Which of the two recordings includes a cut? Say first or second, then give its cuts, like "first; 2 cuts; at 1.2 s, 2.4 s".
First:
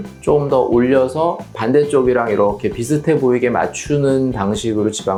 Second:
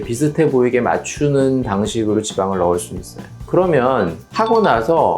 second; 1 cut; at 3.4 s